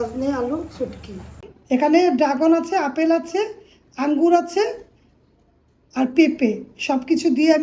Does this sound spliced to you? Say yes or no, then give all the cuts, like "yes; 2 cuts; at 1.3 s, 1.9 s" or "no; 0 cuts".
yes; 1 cut; at 1.5 s